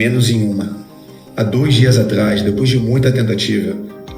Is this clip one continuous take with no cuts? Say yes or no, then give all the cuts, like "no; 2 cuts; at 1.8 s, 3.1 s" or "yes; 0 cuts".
yes; 0 cuts